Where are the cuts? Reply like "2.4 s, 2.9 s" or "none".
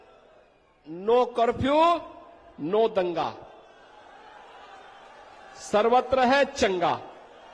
none